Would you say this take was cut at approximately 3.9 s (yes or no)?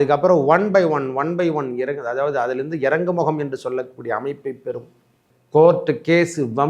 no